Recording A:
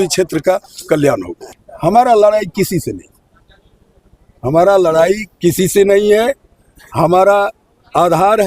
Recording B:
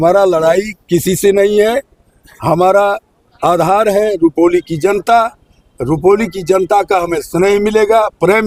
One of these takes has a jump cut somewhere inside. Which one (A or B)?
A